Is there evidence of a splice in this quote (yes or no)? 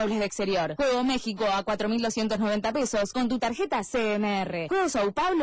yes